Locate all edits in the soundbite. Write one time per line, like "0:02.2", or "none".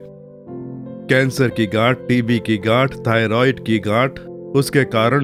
none

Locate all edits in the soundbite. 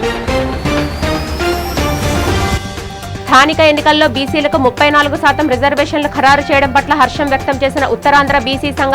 0:02.6

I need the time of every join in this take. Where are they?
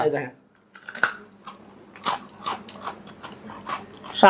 none

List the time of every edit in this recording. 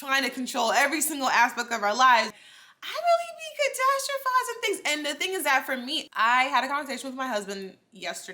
0:02.4
0:06.1

